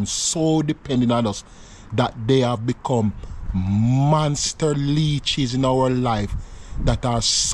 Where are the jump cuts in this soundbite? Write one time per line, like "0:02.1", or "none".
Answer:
none